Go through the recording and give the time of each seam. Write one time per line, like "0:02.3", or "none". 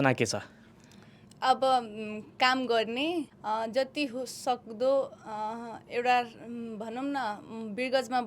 0:03.3